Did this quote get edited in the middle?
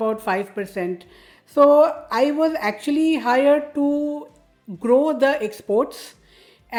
no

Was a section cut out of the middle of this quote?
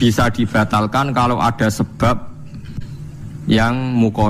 no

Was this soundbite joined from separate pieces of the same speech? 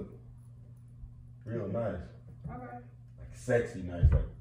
no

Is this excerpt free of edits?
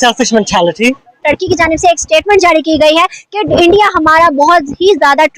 no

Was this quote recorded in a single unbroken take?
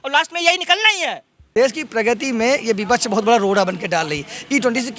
no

